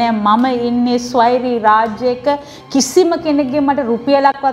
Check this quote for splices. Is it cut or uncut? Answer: uncut